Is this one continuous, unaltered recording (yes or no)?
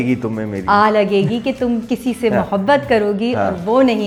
yes